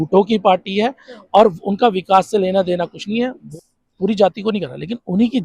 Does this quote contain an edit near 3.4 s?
yes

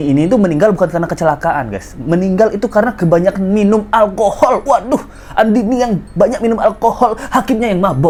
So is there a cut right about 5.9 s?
no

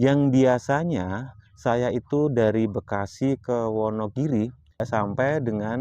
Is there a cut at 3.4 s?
no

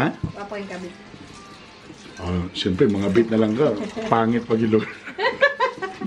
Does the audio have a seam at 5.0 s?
no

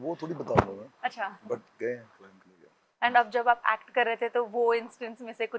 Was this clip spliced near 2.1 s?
no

